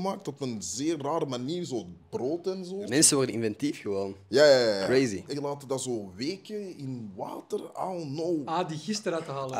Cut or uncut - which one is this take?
cut